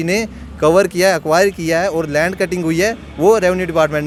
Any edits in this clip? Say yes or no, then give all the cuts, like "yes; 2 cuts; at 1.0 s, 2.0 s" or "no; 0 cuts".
no; 0 cuts